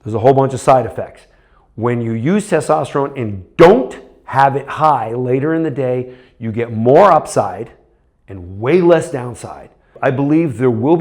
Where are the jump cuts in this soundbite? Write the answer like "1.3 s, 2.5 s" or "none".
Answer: 9.9 s